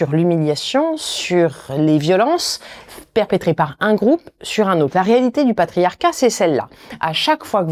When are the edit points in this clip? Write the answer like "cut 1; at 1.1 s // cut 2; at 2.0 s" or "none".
none